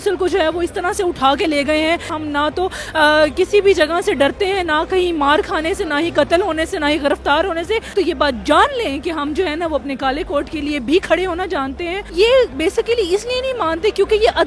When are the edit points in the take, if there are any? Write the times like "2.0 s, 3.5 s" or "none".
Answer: 7.9 s, 12.0 s